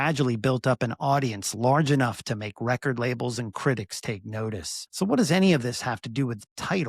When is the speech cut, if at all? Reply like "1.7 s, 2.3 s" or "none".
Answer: 4.8 s